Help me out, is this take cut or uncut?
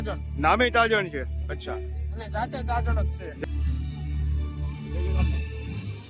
cut